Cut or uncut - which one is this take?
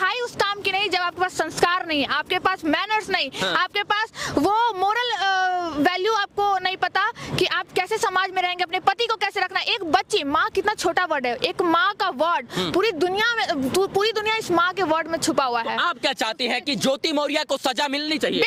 uncut